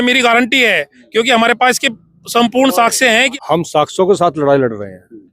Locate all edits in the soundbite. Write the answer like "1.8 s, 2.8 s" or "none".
3.3 s